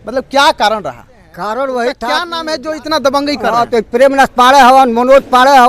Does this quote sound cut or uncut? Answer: cut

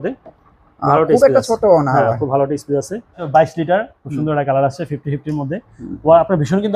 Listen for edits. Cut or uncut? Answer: cut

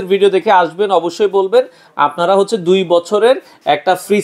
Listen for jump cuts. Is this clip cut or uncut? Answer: uncut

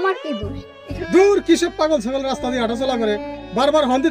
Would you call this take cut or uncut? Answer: cut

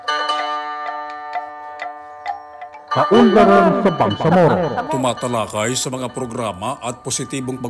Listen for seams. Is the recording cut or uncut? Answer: cut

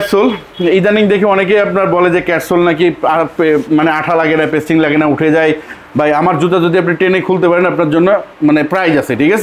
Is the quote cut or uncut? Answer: uncut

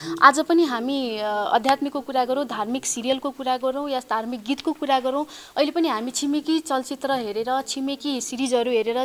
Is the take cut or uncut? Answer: uncut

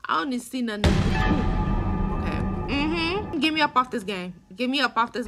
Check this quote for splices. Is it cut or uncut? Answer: cut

